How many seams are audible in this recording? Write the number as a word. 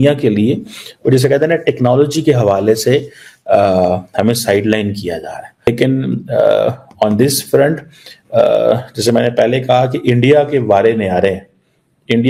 zero